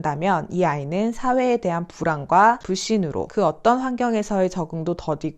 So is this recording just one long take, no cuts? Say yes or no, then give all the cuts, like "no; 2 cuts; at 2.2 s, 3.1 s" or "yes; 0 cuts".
yes; 0 cuts